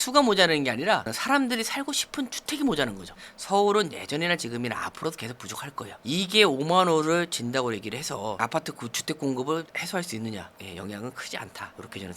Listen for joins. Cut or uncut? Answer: cut